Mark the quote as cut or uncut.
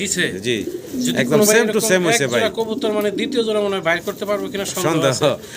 uncut